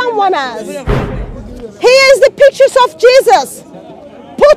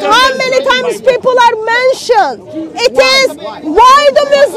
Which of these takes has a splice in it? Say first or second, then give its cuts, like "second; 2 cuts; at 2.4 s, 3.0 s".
first; 1 cut; at 1.1 s